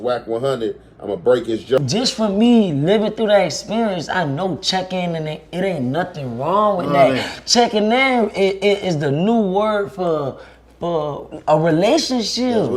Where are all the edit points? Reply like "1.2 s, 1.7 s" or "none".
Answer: 1.8 s

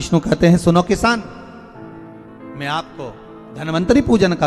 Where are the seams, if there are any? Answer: 1.3 s, 2.6 s

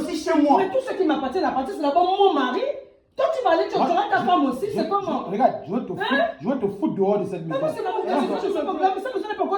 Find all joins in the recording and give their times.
8.5 s

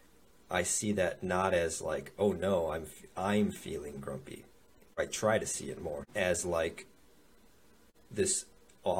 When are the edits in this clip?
5.0 s, 6.1 s

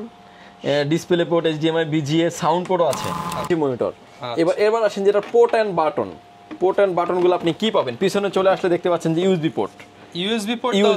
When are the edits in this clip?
3.5 s

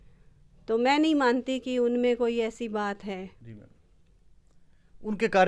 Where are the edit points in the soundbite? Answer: none

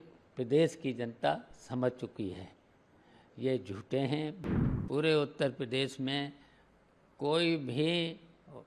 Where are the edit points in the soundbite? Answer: 4.4 s

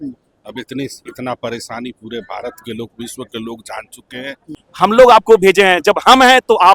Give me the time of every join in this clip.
4.6 s

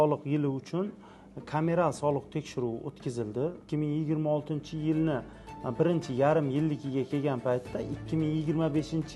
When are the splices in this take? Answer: 3.6 s

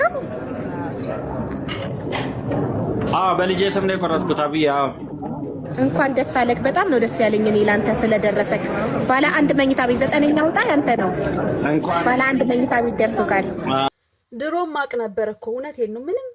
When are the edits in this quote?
13.9 s

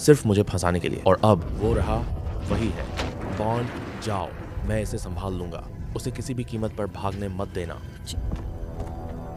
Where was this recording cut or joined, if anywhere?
3.1 s, 7.9 s

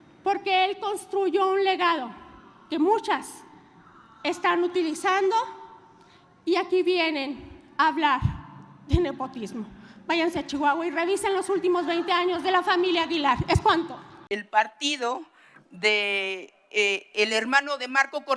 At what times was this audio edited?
14.2 s

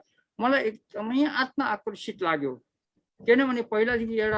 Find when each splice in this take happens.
none

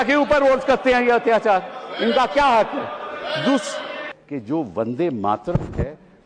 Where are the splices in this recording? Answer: 4.1 s

